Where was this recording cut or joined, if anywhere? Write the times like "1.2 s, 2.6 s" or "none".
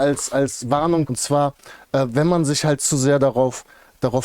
1.1 s